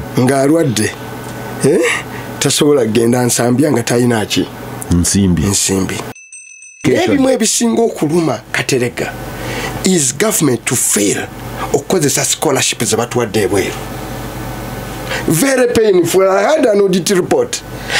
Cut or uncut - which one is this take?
cut